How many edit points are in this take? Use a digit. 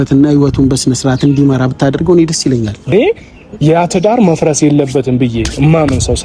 1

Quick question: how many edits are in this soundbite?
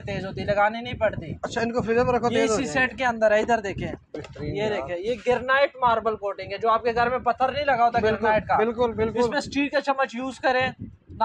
0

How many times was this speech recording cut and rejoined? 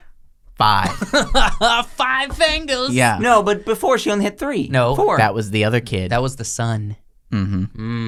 0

